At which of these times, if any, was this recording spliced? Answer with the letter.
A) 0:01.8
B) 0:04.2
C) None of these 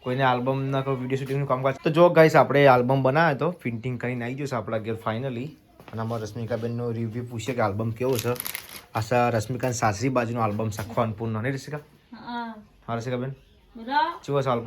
A